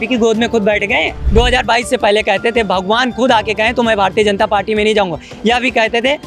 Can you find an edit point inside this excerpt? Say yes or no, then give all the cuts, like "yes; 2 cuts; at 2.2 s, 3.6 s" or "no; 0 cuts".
yes; 1 cut; at 1.2 s